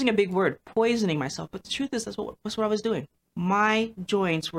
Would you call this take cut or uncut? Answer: cut